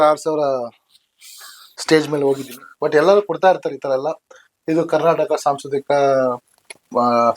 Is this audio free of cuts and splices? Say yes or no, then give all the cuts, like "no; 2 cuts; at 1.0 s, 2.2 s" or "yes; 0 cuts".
yes; 0 cuts